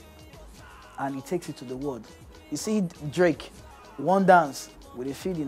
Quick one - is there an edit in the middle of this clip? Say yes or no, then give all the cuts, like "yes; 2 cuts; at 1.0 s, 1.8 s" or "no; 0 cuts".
no; 0 cuts